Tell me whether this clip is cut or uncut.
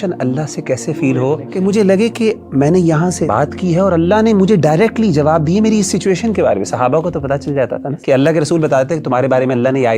cut